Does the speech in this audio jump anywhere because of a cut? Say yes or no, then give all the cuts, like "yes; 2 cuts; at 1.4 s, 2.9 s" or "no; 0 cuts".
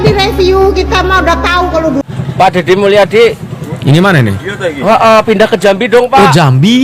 yes; 1 cut; at 2.0 s